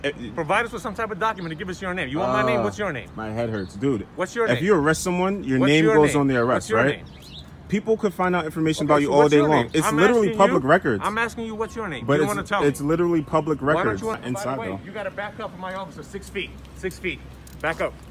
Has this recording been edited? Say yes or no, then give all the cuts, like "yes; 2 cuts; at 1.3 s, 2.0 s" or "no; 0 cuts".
yes; 1 cut; at 14.2 s